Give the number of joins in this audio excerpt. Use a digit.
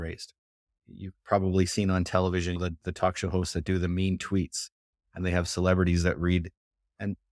1